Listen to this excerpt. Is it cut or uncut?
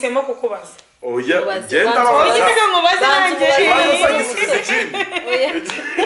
uncut